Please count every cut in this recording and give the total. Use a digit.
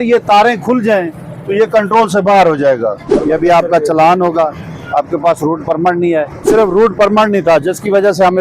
2